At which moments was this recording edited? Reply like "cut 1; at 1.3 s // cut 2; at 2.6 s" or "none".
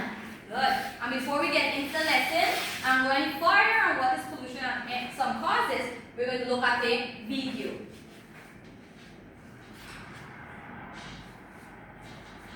cut 1; at 8.6 s